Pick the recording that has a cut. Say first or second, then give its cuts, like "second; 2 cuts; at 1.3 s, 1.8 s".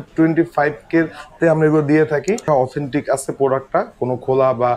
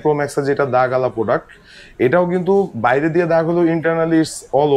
first; 1 cut; at 2.4 s